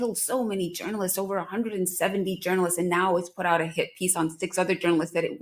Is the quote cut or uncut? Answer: uncut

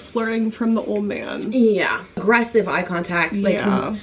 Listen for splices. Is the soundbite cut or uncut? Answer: cut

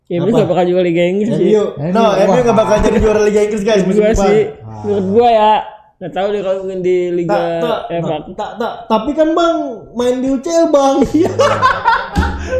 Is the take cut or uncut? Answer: uncut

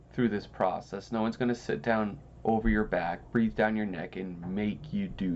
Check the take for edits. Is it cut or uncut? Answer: uncut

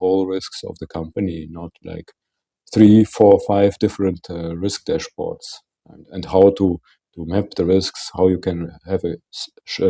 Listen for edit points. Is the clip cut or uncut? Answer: uncut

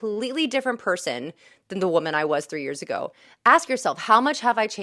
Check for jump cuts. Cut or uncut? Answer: cut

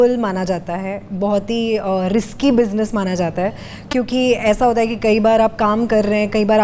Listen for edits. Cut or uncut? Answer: uncut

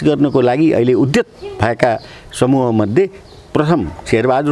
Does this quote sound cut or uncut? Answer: uncut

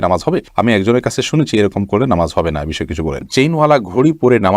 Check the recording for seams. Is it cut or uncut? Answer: cut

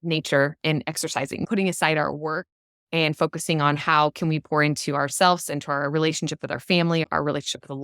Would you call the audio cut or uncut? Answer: cut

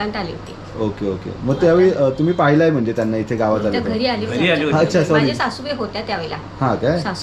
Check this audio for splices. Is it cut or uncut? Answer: uncut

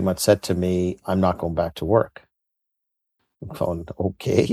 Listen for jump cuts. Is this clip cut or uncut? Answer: uncut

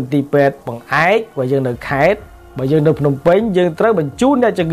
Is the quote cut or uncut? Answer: uncut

